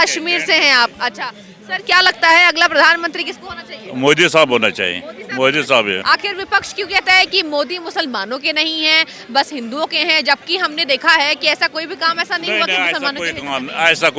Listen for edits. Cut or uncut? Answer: cut